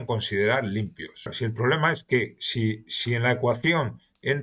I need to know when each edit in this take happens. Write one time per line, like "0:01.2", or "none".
0:01.3

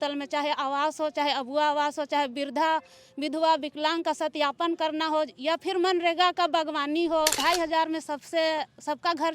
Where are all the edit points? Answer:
0:07.4

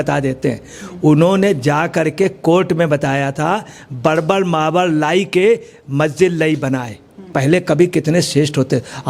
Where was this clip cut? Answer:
0:07.3

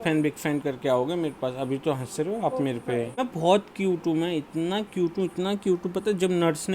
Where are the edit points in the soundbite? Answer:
0:03.1

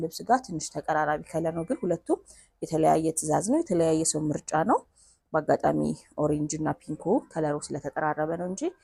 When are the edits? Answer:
none

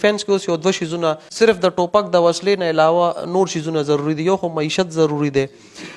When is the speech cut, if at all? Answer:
0:01.2

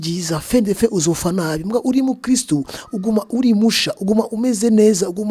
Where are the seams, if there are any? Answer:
none

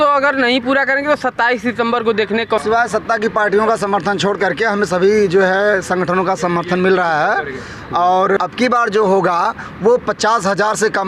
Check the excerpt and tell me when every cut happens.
0:02.6
0:08.4

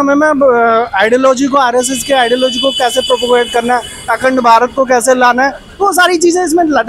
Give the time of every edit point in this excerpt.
none

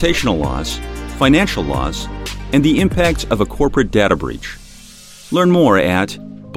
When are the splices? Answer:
none

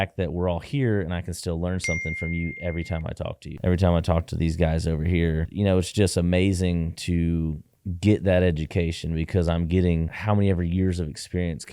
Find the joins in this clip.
0:03.5
0:05.4

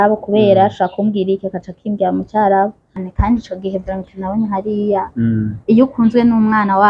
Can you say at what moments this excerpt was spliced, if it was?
0:03.0

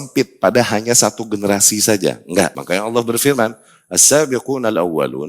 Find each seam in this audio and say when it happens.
0:02.6

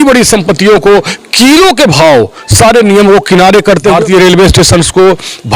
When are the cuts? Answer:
0:03.9

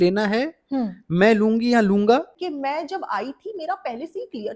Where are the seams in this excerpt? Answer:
0:02.3

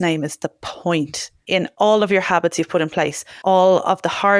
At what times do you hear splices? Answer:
0:01.6
0:03.2

